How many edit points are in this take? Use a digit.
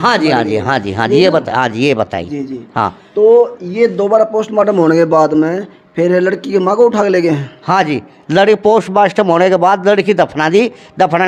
0